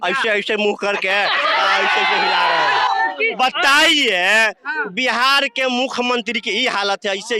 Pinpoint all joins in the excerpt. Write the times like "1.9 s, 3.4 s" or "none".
3.2 s